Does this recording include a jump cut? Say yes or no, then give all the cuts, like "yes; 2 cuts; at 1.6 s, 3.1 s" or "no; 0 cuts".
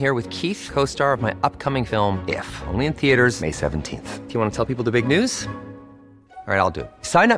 no; 0 cuts